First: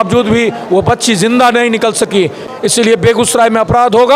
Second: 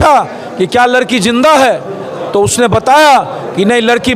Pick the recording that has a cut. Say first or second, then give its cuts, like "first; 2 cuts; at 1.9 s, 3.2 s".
first; 1 cut; at 2.4 s